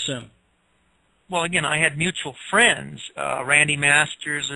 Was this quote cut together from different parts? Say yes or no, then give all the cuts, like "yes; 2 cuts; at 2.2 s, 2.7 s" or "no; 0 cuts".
yes; 1 cut; at 3.4 s